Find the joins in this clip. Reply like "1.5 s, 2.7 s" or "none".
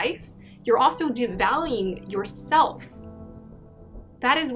none